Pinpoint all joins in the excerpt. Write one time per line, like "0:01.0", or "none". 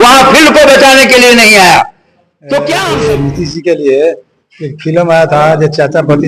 0:02.7